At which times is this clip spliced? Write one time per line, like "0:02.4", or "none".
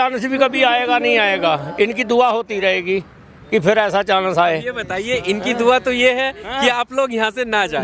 none

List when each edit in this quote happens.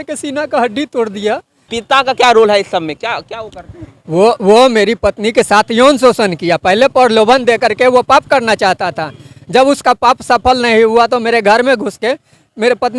0:01.7

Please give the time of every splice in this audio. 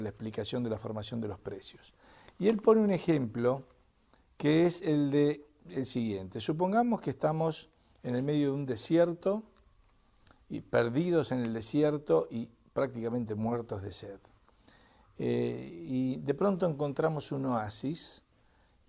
0:10.4

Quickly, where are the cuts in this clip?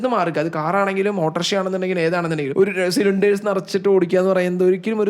0:02.5

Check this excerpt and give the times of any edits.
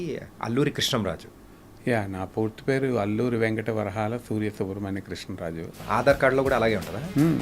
0:05.8

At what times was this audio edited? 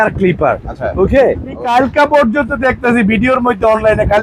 0:01.7

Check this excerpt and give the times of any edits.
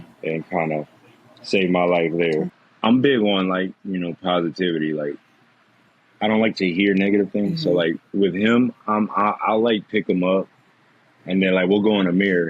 0:02.6

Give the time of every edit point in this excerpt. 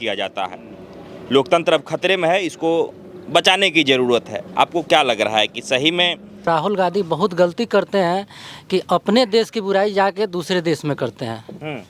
0:06.5

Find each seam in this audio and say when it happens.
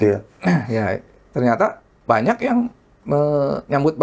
0:01.1
0:01.9

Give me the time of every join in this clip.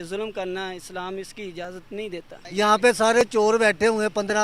0:02.4

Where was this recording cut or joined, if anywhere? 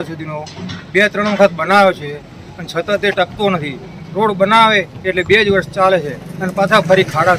none

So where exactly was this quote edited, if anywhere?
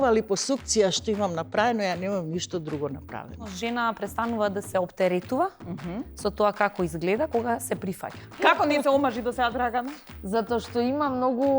0:03.5
0:08.4

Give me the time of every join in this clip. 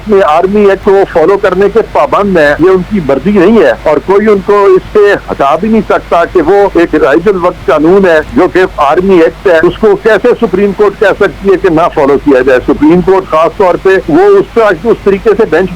0:00.8
0:02.6
0:03.8
0:06.7
0:08.3
0:09.6
0:14.0

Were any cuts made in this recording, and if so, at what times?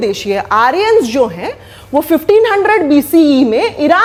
none

